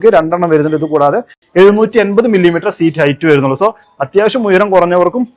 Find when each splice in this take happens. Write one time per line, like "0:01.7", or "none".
0:01.4